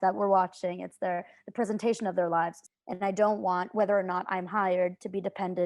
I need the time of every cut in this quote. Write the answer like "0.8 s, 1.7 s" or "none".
2.6 s